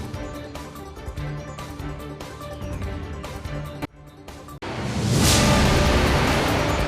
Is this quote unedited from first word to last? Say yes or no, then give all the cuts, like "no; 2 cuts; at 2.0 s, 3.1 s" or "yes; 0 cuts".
yes; 0 cuts